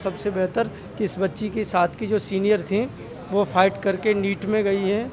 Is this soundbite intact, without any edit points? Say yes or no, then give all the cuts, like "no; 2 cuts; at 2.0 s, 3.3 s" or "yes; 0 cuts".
yes; 0 cuts